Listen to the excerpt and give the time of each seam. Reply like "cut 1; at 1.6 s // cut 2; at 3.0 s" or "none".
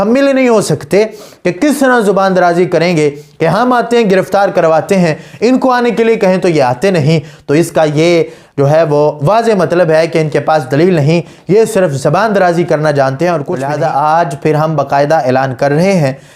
cut 1; at 13.6 s